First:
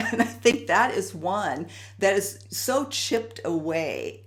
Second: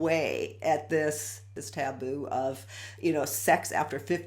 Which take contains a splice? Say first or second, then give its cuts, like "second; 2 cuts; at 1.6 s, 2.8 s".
second; 1 cut; at 1.6 s